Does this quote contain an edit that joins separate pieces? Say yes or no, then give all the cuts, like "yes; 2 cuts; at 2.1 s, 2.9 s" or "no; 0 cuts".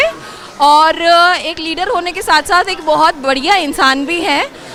no; 0 cuts